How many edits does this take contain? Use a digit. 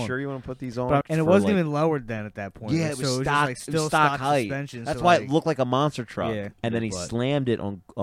2